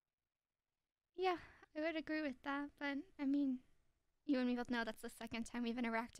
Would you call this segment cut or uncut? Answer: uncut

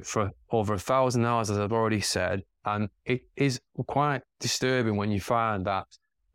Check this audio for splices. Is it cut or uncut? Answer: uncut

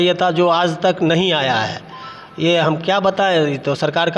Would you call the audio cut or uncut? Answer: uncut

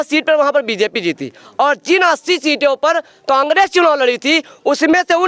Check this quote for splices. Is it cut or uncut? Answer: uncut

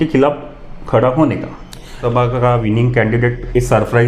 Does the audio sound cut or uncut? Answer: cut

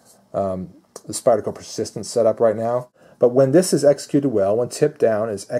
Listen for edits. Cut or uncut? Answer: cut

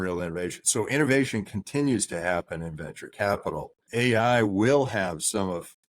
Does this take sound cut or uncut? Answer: cut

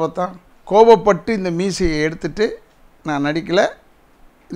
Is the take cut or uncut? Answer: uncut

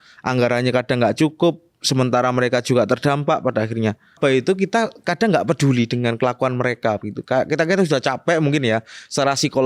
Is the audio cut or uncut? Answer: cut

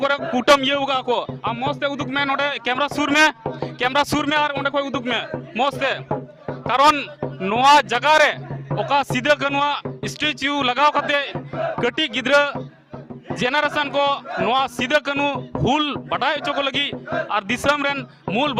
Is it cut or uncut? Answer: uncut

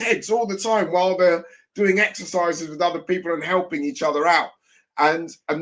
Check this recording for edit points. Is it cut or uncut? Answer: uncut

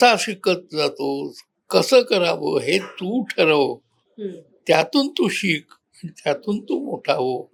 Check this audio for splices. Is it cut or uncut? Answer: uncut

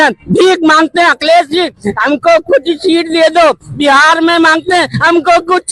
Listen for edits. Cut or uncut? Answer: uncut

